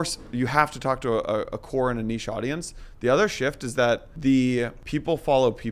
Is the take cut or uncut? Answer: cut